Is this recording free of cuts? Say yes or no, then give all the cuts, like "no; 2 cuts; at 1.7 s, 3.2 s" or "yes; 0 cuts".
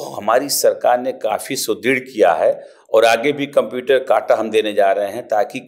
yes; 0 cuts